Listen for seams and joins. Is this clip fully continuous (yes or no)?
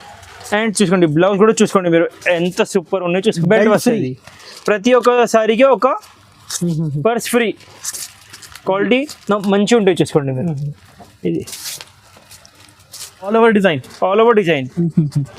no